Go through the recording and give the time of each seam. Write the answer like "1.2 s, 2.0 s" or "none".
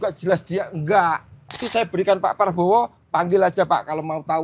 1.6 s